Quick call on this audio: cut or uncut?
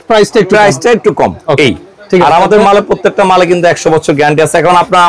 uncut